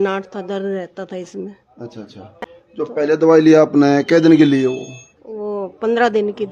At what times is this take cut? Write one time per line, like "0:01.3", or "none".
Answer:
none